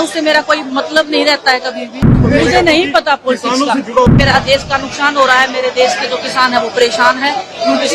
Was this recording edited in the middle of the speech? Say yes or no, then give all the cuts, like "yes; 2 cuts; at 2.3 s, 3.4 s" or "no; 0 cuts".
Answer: yes; 2 cuts; at 2.2 s, 4.1 s